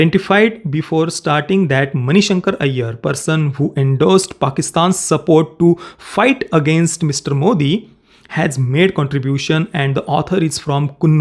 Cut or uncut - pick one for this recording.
uncut